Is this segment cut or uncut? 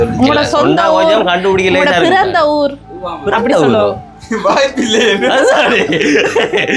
uncut